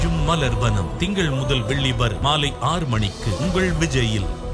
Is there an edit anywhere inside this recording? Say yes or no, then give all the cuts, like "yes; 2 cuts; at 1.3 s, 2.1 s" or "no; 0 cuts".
no; 0 cuts